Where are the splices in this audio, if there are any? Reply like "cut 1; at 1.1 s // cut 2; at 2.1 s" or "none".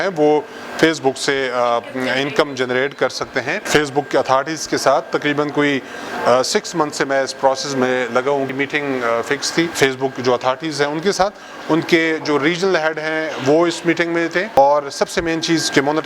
cut 1; at 3.6 s // cut 2; at 8.5 s // cut 3; at 9.7 s // cut 4; at 14.6 s